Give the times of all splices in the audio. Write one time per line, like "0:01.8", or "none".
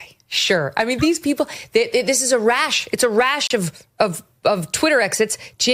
none

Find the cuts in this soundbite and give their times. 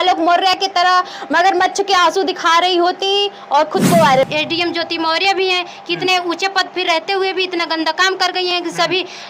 0:04.3

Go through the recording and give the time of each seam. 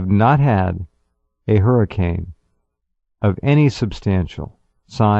0:02.1

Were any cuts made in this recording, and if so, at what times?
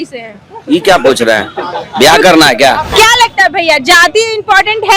0:02.9

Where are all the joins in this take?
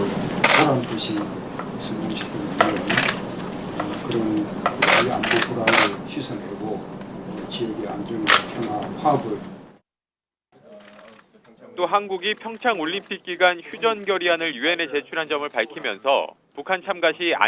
0:09.8

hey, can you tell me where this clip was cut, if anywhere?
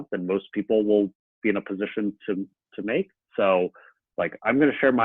none

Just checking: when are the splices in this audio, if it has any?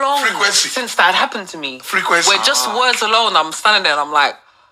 none

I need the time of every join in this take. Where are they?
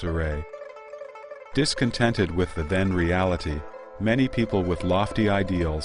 none

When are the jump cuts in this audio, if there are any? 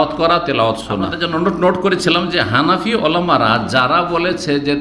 0:01.2

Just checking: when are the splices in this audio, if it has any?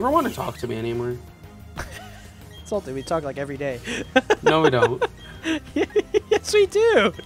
none

